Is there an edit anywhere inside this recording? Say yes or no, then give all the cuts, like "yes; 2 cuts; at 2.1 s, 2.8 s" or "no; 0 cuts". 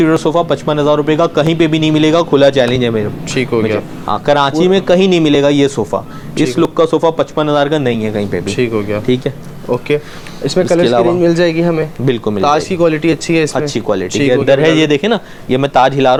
no; 0 cuts